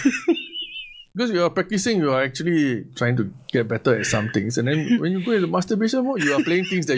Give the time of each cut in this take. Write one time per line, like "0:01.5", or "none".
0:01.0